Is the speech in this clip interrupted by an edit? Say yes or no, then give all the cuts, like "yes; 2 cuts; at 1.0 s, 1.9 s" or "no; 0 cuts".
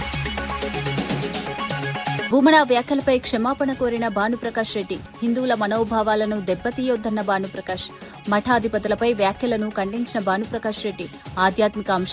yes; 2 cuts; at 0.7 s, 2.2 s